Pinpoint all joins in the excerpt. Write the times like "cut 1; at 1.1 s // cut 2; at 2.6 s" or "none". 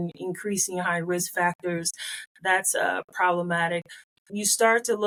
none